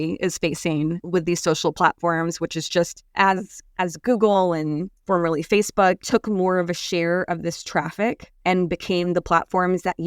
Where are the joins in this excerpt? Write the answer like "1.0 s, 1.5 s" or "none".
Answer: 3.0 s, 8.3 s